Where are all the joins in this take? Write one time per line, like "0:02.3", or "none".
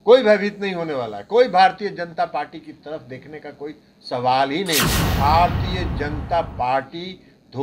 0:05.0